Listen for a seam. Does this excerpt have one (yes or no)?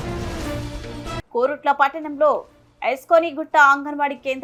no